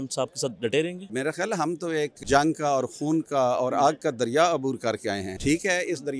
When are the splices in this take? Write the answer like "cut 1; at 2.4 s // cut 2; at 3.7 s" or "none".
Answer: cut 1; at 1.0 s // cut 2; at 2.2 s